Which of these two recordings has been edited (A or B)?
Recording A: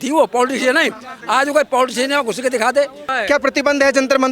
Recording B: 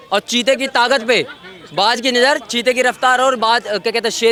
A